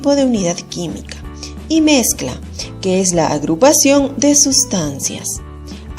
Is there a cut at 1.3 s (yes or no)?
no